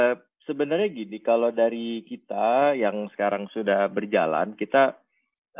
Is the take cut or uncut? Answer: uncut